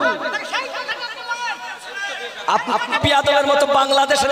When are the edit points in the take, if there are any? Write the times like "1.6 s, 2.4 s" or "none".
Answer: none

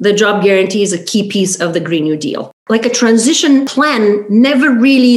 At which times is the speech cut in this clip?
2.6 s, 3.7 s

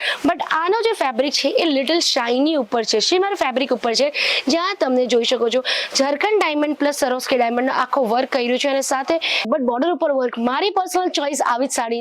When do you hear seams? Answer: 9.5 s

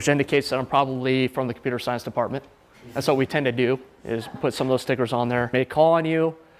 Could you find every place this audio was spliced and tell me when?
none

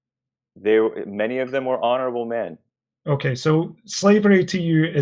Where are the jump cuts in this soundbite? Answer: 2.6 s

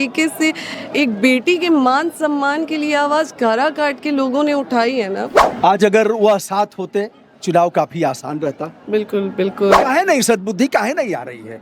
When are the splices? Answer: 5.4 s, 9.8 s

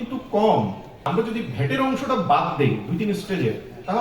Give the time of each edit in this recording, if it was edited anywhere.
1.0 s

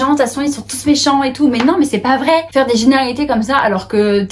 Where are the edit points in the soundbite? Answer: 2.5 s

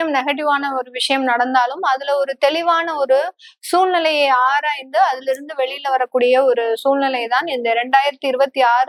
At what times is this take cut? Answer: none

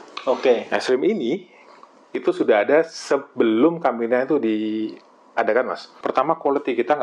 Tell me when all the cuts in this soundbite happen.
5.8 s

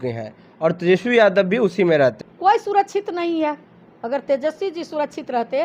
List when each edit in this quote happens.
2.2 s

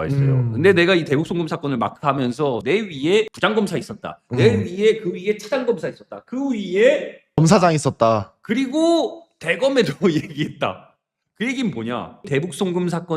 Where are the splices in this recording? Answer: 12.1 s

